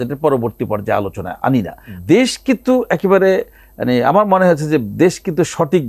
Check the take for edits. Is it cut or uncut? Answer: cut